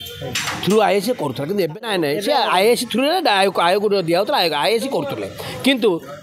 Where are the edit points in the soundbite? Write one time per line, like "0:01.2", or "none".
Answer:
0:01.8